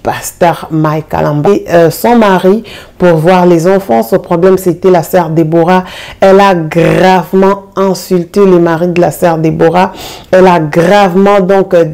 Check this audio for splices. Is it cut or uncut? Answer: cut